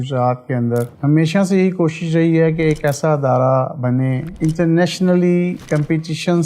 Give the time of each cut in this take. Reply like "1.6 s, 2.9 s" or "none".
0.9 s, 4.3 s